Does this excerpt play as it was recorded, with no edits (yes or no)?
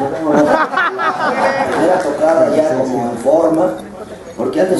no